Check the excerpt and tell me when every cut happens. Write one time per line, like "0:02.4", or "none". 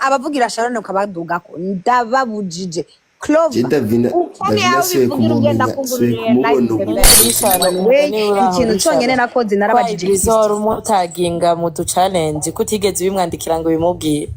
0:07.2